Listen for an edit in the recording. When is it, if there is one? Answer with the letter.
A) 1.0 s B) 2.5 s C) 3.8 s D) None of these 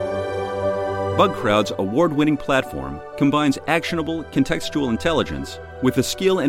A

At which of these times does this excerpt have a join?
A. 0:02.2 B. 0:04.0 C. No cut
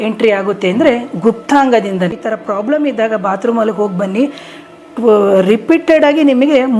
A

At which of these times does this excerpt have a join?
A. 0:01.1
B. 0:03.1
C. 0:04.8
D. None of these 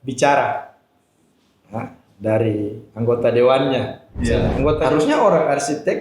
C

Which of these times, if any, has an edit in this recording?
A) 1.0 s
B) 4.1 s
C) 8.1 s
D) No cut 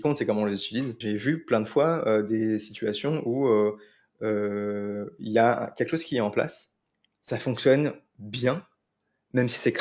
A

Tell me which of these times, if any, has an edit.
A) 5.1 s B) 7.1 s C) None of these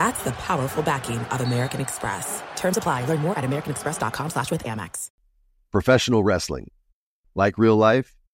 A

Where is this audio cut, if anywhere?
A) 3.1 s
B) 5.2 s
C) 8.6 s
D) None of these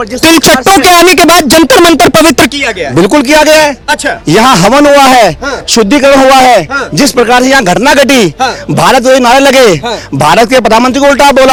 D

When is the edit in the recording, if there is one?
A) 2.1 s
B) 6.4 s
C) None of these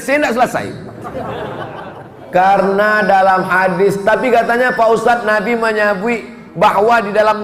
A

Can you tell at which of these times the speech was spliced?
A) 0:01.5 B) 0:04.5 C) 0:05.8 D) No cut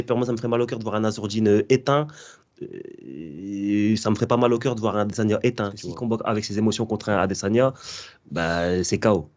C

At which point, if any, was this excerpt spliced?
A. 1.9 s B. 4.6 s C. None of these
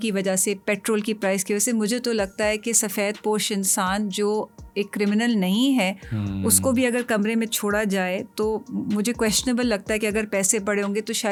C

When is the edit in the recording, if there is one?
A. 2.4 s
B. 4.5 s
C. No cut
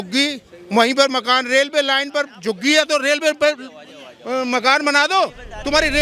C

